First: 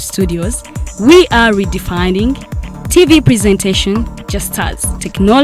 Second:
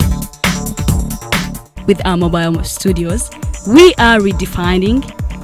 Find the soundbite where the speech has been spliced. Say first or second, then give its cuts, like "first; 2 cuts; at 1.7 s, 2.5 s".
second; 1 cut; at 0.9 s